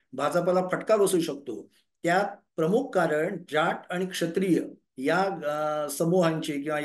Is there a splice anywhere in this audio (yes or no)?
no